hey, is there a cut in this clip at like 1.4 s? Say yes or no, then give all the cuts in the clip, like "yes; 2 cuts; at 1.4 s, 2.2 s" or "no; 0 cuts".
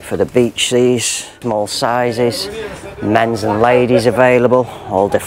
yes; 1 cut; at 1.4 s